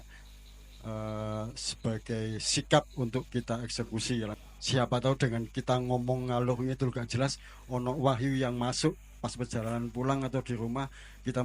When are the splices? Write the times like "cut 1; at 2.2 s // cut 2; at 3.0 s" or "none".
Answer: cut 1; at 4.4 s